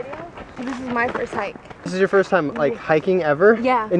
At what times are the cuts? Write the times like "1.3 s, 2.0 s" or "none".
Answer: 1.9 s